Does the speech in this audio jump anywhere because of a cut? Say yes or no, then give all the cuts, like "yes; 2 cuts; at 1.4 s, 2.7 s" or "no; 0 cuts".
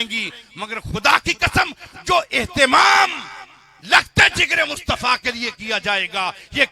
no; 0 cuts